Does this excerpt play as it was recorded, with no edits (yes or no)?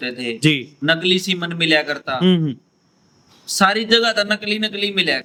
yes